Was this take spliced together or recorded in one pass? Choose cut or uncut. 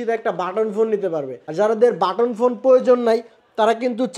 uncut